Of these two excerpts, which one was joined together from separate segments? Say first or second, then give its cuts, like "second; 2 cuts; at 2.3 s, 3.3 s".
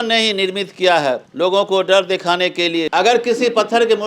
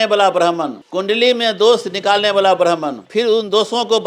first; 1 cut; at 2.9 s